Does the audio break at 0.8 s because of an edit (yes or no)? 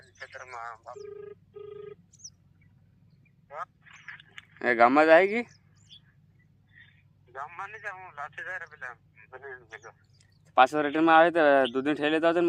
yes